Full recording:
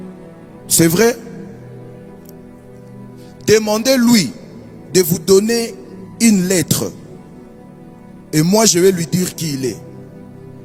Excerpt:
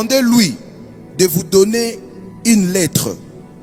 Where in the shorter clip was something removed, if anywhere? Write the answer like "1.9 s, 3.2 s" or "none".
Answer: none